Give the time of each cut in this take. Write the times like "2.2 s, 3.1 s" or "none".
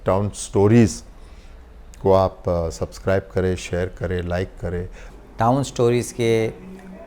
5.0 s